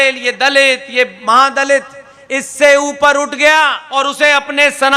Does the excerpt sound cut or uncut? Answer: cut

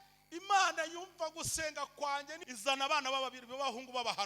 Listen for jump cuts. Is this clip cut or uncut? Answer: cut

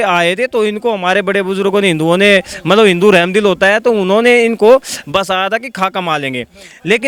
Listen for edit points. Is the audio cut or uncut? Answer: uncut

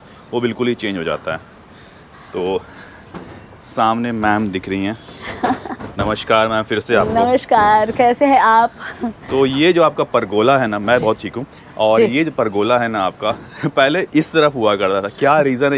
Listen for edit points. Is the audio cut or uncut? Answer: uncut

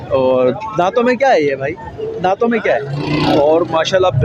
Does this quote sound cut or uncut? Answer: cut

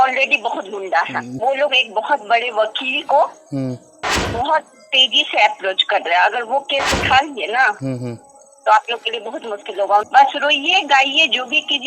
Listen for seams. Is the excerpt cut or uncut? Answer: cut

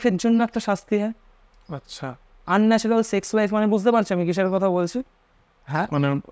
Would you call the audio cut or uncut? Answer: uncut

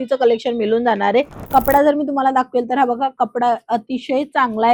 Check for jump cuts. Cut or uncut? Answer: cut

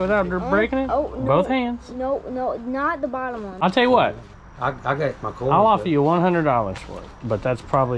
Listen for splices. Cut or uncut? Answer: cut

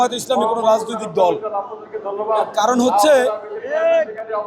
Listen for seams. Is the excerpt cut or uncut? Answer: uncut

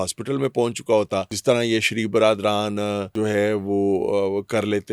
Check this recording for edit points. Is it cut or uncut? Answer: cut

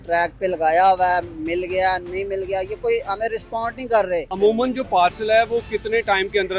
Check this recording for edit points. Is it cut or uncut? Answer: uncut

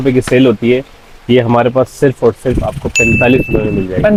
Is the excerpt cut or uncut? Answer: uncut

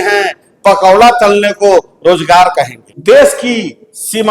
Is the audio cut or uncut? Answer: uncut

